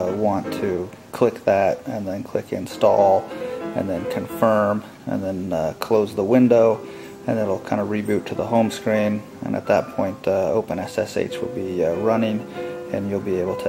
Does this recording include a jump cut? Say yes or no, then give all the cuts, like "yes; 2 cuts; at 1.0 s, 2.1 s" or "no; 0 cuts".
no; 0 cuts